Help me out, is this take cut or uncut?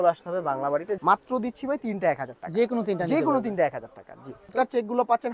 cut